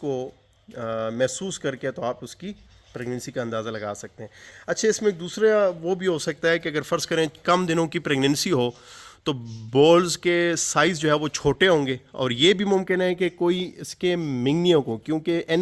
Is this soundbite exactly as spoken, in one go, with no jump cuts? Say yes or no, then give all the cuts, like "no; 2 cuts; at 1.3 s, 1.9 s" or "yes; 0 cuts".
yes; 0 cuts